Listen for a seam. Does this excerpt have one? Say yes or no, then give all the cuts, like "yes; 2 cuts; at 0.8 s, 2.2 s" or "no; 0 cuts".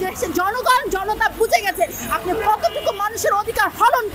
no; 0 cuts